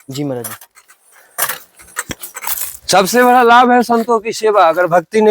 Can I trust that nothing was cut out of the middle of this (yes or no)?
no